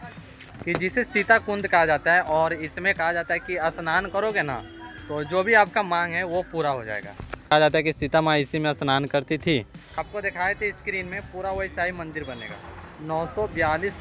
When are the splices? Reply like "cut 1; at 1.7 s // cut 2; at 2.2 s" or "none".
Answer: cut 1; at 7.5 s // cut 2; at 10.0 s